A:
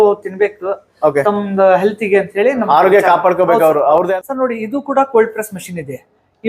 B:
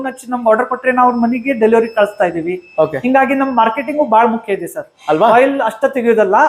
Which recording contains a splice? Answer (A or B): A